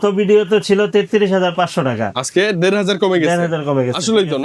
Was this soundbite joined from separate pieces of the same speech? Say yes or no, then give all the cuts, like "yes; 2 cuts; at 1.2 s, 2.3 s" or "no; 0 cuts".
no; 0 cuts